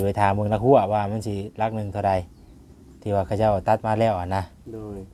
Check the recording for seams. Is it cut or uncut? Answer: uncut